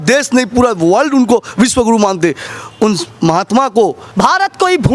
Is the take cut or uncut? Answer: cut